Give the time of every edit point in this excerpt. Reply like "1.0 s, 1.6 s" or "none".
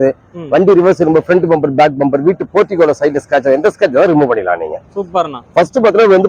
none

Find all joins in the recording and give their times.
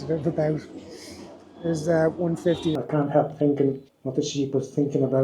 2.8 s, 3.9 s

